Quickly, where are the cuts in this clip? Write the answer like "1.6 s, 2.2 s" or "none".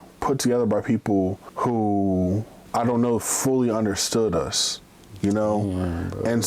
1.5 s, 2.6 s